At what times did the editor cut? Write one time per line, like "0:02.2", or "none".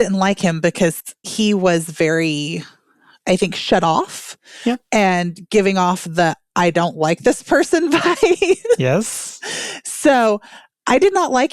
0:01.2